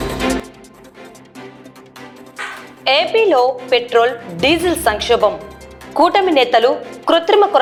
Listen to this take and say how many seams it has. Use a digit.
0